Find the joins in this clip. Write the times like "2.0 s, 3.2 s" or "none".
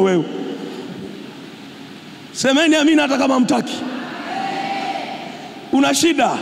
none